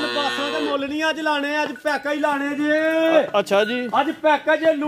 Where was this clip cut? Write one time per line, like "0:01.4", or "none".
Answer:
none